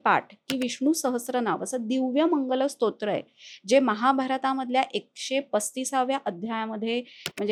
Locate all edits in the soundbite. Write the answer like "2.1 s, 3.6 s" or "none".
none